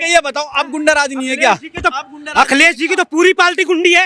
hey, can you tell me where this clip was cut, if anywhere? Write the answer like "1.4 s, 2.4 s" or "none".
none